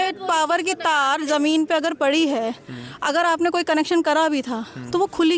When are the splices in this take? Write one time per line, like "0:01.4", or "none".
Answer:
none